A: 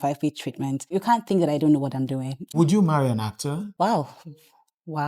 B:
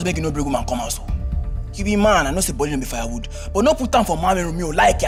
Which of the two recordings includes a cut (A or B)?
A